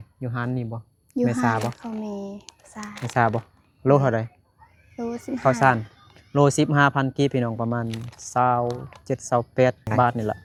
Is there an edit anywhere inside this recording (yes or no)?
no